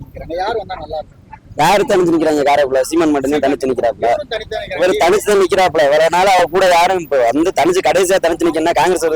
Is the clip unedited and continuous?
yes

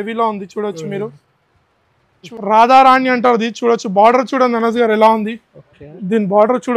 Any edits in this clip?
yes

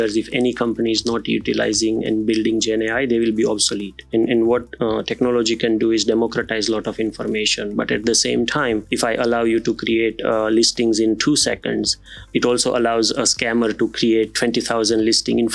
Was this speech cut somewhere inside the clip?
yes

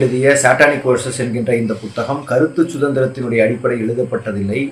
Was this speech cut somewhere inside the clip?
no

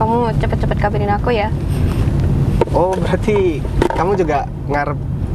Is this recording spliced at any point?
no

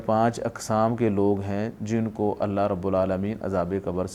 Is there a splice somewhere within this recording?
no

